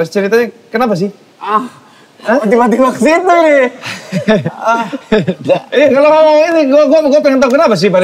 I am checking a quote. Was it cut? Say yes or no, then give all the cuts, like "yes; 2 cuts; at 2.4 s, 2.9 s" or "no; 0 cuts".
no; 0 cuts